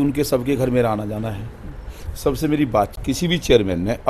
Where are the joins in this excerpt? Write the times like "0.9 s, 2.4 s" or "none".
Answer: 3.0 s